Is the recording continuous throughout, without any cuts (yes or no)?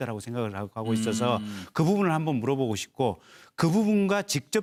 yes